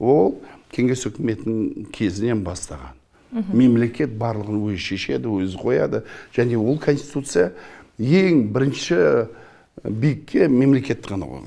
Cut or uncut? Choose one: uncut